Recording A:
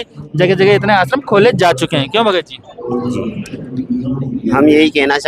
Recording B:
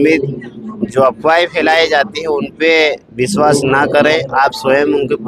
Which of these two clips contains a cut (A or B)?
A